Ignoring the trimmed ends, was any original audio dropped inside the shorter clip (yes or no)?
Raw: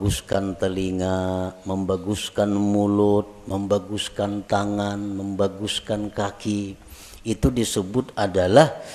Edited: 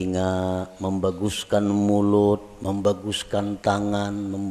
no